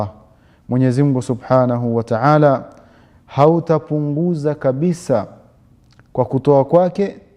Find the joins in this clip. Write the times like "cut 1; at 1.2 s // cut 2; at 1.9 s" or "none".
none